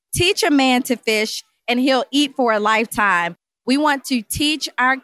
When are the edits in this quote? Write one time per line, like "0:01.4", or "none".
0:03.5